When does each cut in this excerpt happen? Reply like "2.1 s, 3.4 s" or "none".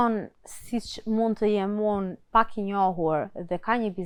none